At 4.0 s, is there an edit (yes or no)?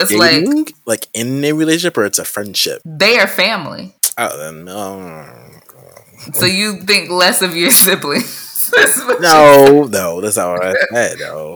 yes